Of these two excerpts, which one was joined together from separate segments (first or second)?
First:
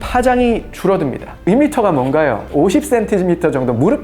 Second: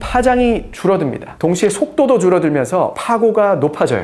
first